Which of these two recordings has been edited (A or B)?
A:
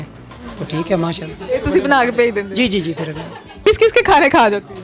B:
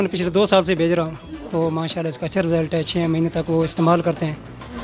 A